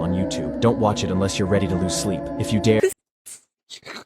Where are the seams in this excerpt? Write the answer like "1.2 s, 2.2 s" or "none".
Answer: 2.8 s